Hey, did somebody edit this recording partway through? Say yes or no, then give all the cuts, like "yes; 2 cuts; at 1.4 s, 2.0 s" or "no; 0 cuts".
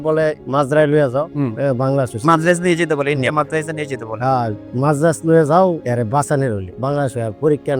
no; 0 cuts